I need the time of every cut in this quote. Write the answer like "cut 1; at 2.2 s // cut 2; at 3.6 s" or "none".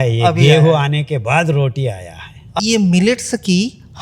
cut 1; at 2.6 s